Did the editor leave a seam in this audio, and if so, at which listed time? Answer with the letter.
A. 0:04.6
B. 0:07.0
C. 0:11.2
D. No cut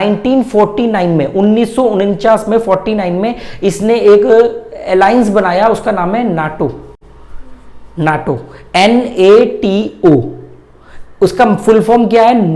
D